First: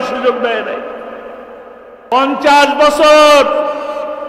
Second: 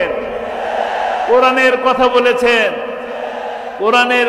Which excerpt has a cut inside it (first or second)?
first